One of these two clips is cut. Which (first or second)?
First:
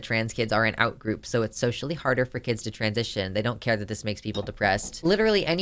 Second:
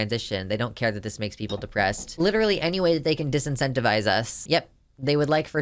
second